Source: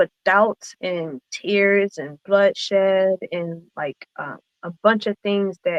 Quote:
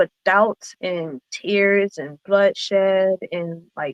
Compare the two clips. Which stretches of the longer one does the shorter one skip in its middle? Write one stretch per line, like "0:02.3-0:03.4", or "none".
none

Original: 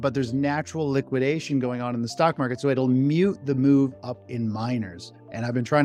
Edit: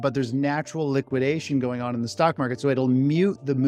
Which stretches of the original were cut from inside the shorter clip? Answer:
none

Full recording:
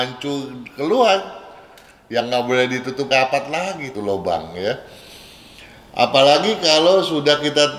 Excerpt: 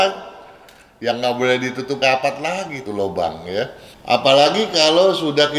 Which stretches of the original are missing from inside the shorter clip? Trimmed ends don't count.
0:05.0-0:05.8

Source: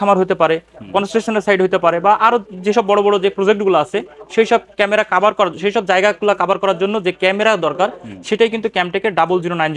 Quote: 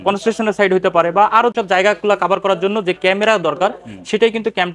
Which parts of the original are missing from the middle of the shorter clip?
0:02.5-0:05.8

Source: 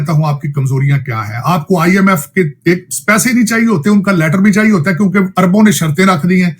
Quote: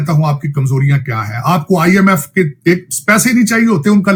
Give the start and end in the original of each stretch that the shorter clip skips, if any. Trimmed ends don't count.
none

